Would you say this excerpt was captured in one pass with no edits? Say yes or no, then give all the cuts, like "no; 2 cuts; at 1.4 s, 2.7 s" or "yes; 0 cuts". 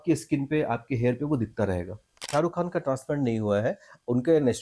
no; 1 cut; at 2.3 s